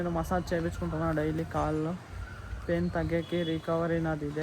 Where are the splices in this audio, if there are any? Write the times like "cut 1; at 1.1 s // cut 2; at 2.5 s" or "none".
none